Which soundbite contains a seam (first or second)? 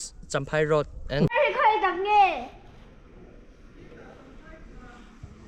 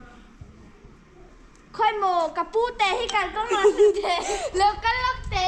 first